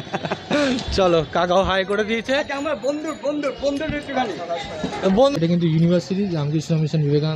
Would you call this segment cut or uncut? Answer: cut